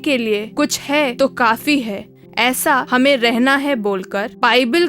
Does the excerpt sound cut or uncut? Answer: cut